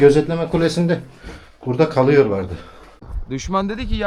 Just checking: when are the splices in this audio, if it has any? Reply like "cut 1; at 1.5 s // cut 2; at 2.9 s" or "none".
cut 1; at 3.1 s